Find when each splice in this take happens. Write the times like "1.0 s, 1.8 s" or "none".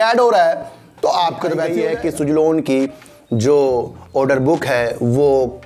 1.7 s

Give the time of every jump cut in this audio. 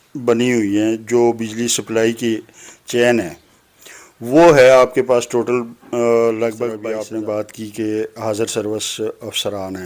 6.8 s

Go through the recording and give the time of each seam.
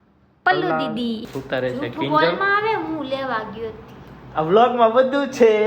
1.3 s

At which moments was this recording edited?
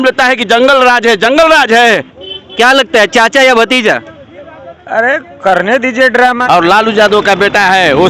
2.1 s, 6.4 s

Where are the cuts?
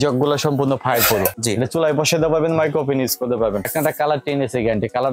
1.4 s, 3.7 s

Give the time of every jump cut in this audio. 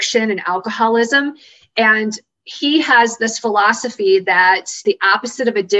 4.8 s

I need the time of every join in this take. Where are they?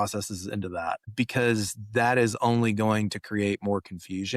1.0 s

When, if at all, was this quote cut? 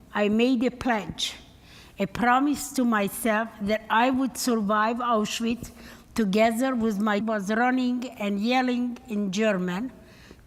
none

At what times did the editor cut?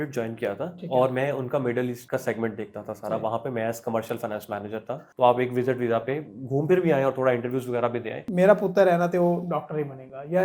2.0 s, 5.0 s, 8.2 s

